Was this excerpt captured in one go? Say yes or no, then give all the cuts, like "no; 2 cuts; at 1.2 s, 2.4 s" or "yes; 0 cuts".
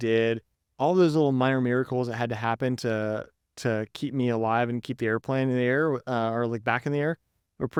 yes; 0 cuts